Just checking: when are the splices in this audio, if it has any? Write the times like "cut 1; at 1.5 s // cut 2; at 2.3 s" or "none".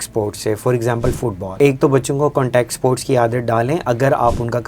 cut 1; at 1.4 s